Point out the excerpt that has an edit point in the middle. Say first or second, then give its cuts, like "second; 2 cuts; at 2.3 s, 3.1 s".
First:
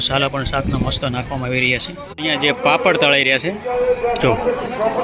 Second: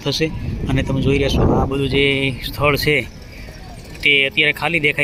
first; 1 cut; at 2.1 s